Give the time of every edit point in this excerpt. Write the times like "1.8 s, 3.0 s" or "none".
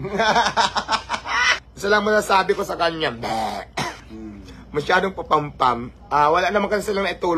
1.6 s, 4.0 s